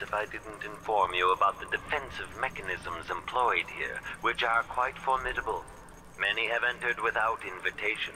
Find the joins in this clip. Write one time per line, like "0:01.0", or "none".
0:04.8